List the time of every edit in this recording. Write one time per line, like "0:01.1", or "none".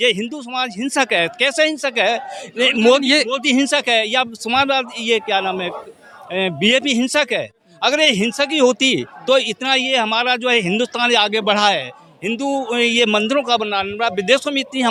none